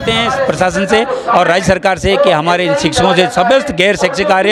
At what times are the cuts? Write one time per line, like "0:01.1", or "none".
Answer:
none